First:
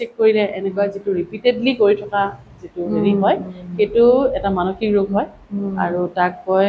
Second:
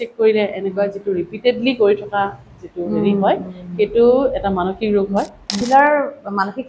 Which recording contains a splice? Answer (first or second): second